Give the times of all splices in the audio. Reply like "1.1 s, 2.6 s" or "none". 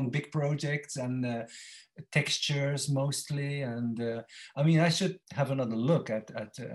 none